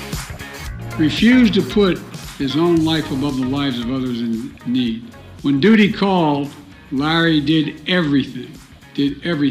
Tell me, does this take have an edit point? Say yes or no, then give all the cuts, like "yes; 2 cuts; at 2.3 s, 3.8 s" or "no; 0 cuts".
yes; 1 cut; at 1.0 s